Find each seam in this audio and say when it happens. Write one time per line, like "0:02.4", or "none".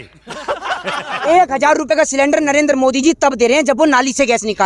0:01.2